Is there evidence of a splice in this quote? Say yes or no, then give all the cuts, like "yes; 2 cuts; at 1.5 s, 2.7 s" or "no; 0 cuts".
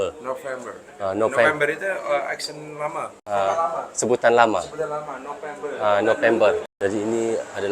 yes; 2 cuts; at 3.2 s, 6.7 s